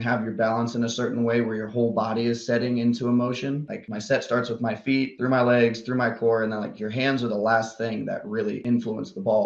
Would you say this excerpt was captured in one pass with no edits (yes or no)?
yes